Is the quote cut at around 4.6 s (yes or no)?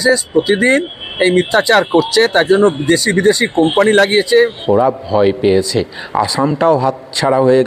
yes